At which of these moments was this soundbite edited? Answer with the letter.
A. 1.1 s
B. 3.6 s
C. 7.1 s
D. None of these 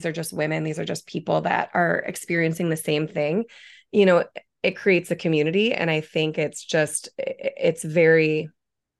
D